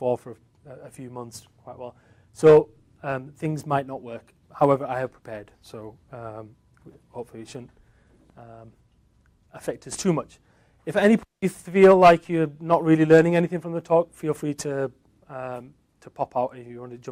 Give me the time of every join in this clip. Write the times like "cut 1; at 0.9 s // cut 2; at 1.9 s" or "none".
none